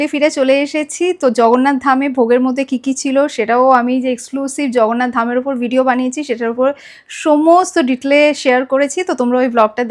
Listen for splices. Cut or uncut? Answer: uncut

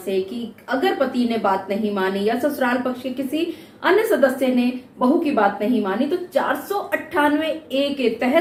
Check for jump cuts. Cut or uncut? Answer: uncut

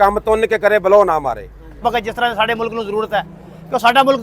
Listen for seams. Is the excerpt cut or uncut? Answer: cut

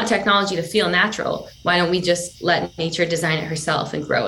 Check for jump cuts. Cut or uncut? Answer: uncut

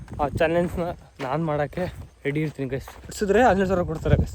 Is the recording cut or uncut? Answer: cut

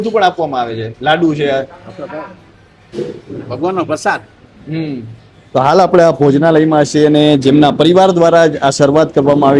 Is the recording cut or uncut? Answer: uncut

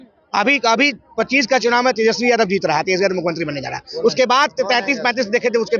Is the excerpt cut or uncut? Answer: uncut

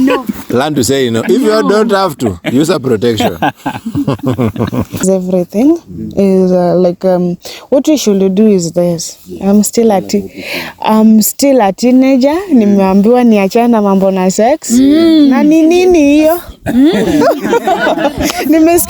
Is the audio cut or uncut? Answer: cut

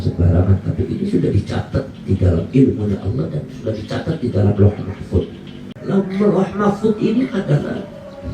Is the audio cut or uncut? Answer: cut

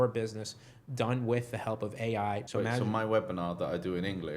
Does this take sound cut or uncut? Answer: cut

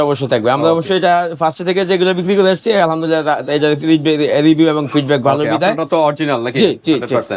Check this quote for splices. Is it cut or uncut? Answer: uncut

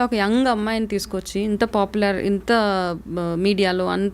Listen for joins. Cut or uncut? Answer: uncut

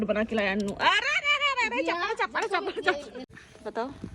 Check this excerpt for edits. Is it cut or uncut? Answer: cut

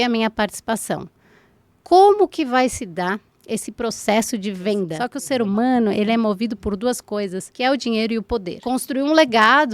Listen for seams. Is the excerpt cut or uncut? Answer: cut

